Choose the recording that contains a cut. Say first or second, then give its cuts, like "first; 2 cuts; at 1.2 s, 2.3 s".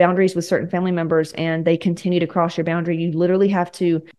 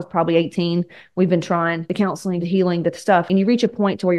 second; 2 cuts; at 2.1 s, 3.3 s